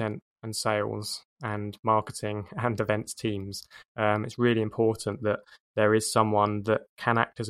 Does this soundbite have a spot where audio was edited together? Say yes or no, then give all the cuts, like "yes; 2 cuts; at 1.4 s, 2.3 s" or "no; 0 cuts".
no; 0 cuts